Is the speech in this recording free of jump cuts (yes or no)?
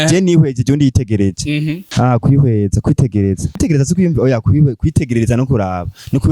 no